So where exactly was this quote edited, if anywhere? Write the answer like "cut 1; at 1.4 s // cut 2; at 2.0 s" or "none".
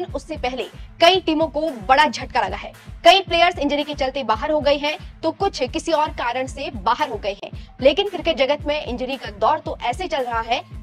none